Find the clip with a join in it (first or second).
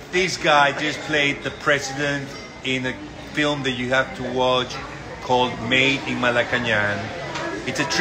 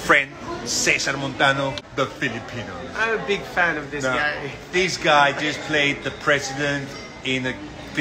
second